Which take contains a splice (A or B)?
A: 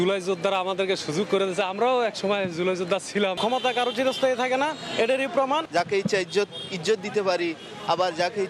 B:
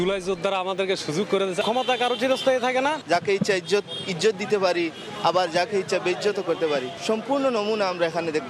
B